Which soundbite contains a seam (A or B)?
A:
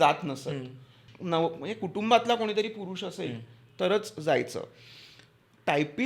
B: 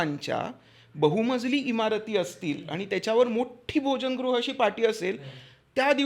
A